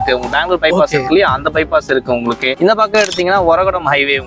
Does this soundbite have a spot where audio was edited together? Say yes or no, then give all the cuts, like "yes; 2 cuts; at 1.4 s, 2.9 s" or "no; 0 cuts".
no; 0 cuts